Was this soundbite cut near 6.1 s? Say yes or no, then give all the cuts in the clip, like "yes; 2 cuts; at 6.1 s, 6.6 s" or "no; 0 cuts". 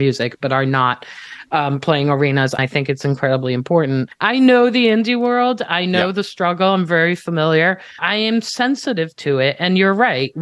no; 3 cuts; at 2.6 s, 4.1 s, 8.0 s